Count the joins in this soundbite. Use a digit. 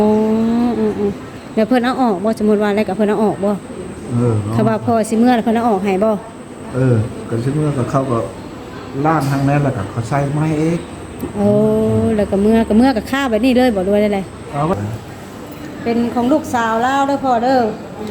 1